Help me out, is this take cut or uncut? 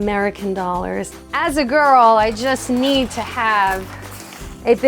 cut